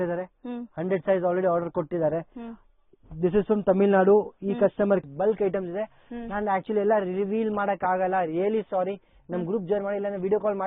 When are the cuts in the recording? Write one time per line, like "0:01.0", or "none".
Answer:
0:05.0